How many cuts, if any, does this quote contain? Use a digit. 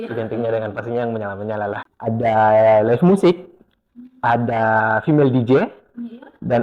1